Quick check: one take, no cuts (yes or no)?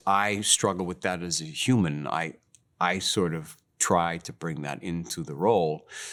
yes